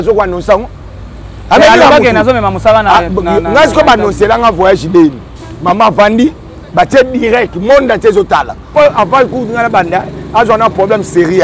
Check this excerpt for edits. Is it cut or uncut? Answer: cut